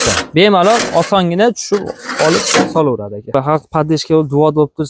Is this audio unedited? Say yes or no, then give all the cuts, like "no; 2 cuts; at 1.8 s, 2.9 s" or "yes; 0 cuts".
no; 1 cut; at 3.3 s